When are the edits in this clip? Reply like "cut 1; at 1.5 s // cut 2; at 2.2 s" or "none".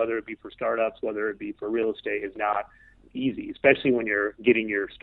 none

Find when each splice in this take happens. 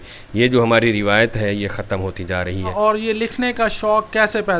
cut 1; at 2.7 s

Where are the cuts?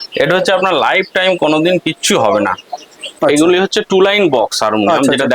cut 1; at 3.0 s

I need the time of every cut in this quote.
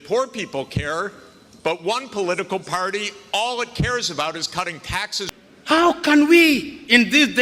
cut 1; at 5.2 s

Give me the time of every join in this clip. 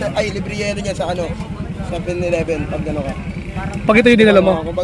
none

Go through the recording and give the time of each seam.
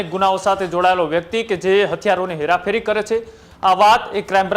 none

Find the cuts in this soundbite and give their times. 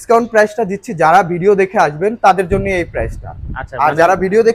none

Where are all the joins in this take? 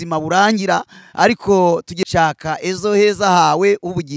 cut 1; at 1.9 s

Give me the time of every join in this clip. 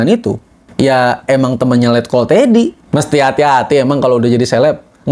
cut 1; at 2.8 s

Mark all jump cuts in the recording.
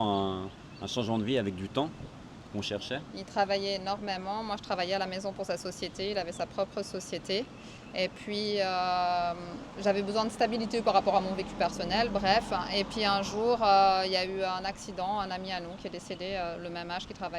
none

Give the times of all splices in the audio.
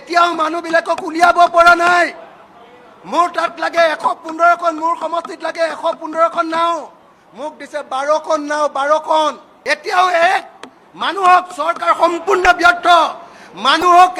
none

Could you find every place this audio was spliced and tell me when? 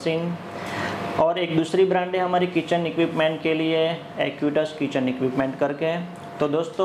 none

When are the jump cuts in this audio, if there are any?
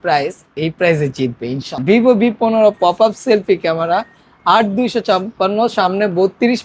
cut 1; at 1.7 s

